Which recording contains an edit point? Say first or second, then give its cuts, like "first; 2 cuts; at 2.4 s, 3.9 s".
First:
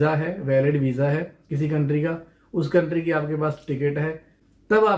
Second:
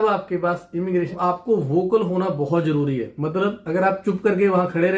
second; 1 cut; at 1.1 s